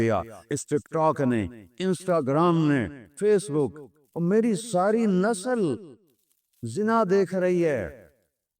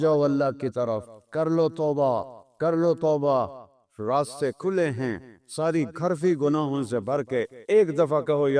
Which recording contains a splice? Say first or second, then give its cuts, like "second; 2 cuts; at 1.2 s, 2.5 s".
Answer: first; 2 cuts; at 1.7 s, 3.0 s